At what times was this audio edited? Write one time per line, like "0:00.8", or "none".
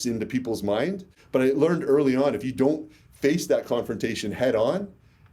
0:01.1